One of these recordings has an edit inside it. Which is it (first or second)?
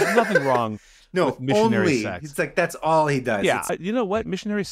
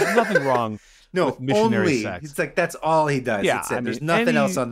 first